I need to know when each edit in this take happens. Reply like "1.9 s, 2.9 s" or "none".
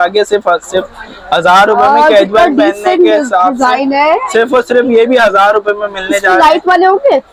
none